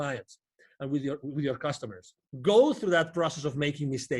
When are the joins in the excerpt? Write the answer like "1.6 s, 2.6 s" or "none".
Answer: 2.2 s

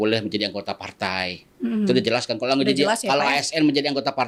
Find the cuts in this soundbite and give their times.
none

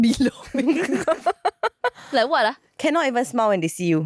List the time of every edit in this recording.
2.7 s

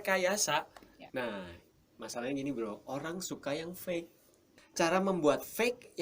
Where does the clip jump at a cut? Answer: 1.0 s, 4.5 s

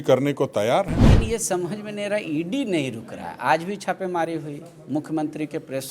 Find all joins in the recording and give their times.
1.1 s

